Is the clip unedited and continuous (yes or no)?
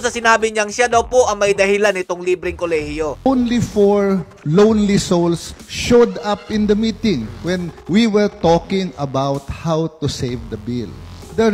no